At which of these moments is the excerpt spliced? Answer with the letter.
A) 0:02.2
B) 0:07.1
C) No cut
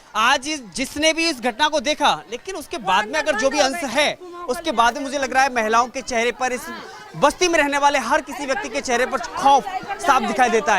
C